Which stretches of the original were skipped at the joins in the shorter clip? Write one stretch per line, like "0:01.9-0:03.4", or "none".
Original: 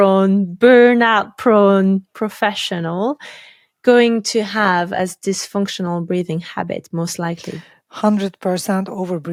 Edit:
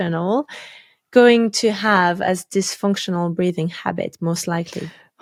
none

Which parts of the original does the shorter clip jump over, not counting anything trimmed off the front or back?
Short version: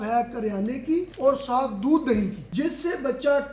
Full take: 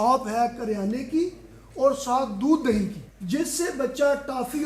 0:01.4-0:01.7
0:03.0-0:03.2

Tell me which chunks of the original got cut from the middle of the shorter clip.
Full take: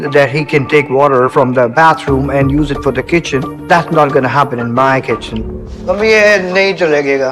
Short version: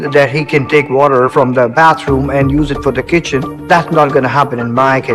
none

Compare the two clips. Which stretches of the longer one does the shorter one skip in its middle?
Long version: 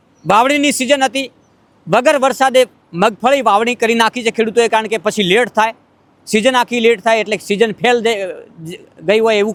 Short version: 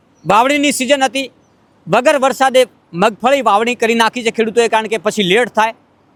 none

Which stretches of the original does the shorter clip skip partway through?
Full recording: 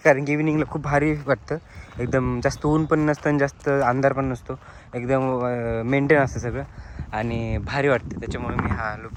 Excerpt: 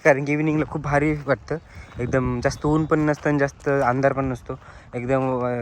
none

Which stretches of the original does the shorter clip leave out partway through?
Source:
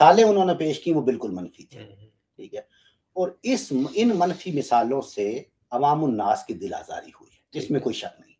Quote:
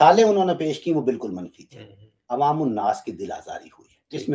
0:02.1-0:05.5

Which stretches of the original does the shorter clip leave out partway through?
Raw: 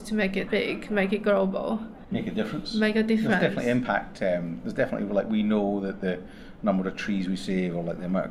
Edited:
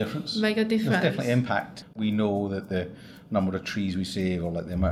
0:04.3-0:05.2

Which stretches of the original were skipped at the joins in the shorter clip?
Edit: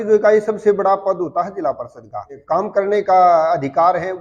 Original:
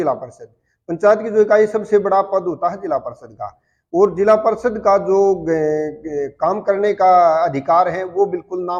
0:03.6-0:06.3

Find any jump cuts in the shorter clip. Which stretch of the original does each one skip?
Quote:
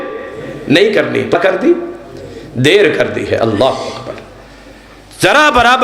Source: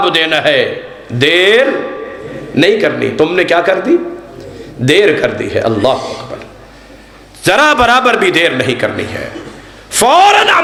0:03.2-0:03.6

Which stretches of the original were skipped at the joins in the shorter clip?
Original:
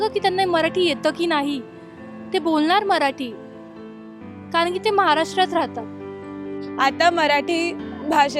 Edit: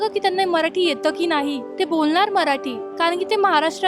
0:01.7-0:02.2
0:03.3-0:04.3

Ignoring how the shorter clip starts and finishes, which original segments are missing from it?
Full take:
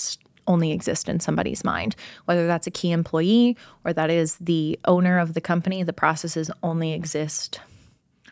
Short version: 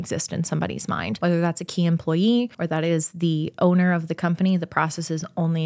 0:01.9-0:02.2
0:03.6-0:03.8

